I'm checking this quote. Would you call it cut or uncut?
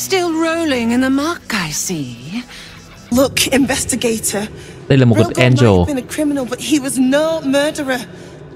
cut